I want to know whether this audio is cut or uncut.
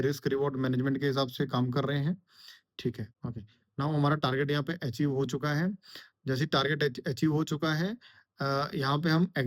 cut